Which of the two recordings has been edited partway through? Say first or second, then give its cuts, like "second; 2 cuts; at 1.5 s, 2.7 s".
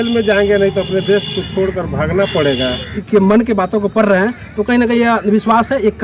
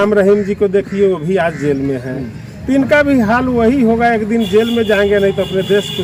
first; 1 cut; at 3.0 s